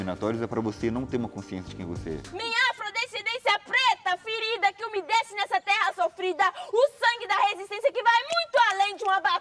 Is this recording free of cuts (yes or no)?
no